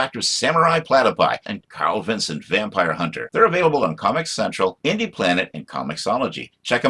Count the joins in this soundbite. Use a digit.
0